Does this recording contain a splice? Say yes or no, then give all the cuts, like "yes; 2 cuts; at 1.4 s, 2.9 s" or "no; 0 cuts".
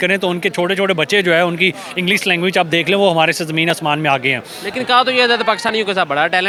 no; 0 cuts